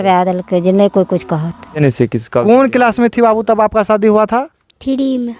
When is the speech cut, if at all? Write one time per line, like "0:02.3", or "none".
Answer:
0:01.8